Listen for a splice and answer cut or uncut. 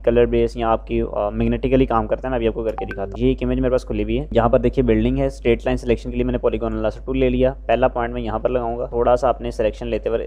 uncut